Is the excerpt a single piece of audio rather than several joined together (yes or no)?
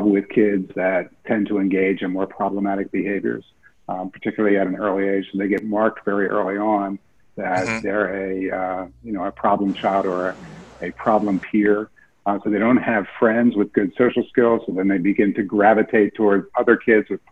yes